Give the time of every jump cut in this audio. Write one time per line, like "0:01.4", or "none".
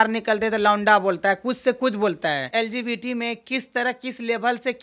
0:02.5